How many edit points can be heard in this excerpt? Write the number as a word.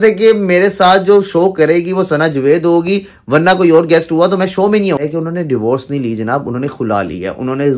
one